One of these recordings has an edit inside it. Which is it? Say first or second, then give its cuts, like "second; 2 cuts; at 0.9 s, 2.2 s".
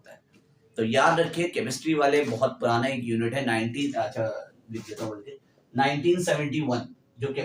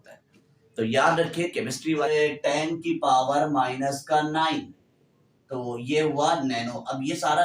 second; 1 cut; at 2.1 s